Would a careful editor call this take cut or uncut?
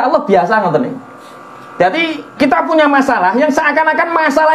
uncut